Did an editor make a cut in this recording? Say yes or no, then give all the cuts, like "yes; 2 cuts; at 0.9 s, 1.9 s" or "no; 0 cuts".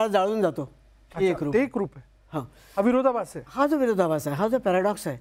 no; 0 cuts